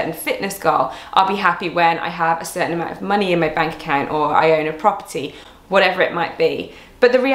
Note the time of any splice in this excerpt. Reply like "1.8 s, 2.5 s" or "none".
none